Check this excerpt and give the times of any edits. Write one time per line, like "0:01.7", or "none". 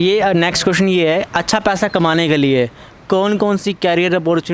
none